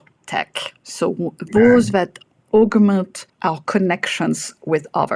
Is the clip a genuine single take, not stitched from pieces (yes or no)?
no